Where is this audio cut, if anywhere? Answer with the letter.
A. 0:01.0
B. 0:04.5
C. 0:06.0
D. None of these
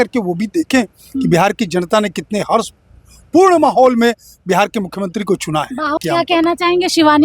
C